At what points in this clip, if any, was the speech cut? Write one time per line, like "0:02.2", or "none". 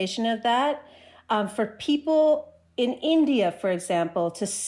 none